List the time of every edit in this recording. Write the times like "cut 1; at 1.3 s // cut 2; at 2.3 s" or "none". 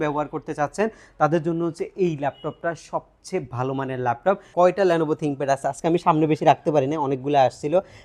cut 1; at 4.5 s

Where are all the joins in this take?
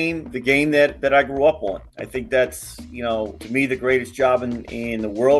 cut 1; at 3.4 s

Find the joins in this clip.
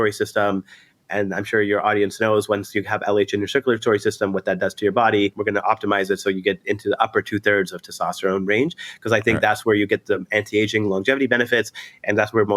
cut 1; at 5.4 s

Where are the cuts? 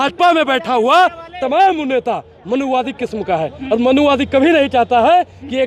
none

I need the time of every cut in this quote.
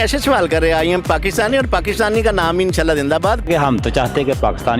cut 1; at 3.5 s

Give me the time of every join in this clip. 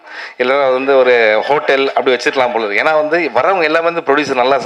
none

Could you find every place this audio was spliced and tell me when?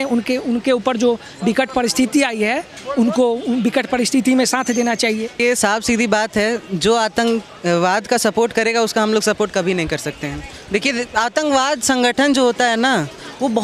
cut 1; at 5.4 s

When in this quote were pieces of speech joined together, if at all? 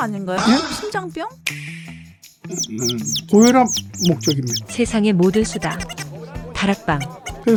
none

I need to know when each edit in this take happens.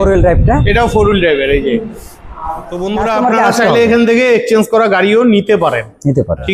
cut 1; at 2.7 s

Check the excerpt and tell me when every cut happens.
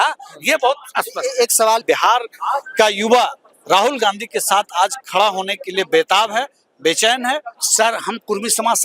cut 1; at 1.8 s // cut 2; at 7.5 s

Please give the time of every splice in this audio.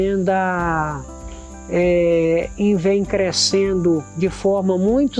none

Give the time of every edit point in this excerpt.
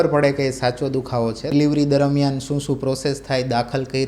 cut 1; at 1.5 s

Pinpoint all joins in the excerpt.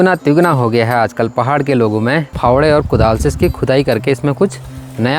cut 1; at 2.3 s

